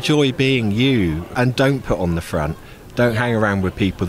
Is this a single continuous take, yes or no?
no